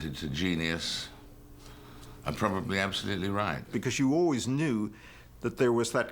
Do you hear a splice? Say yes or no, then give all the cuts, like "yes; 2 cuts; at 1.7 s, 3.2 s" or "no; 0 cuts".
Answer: yes; 1 cut; at 3.7 s